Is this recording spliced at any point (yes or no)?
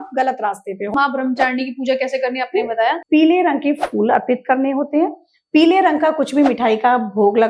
yes